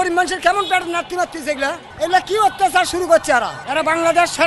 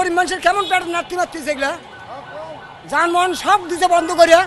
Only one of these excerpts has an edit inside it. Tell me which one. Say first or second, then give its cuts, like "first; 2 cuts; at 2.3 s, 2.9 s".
first; 2 cuts; at 1.8 s, 3.6 s